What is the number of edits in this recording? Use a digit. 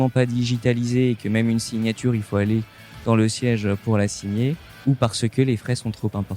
1